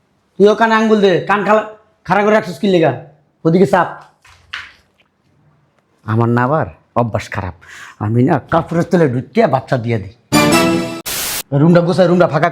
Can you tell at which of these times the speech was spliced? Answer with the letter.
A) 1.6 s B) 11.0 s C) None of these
B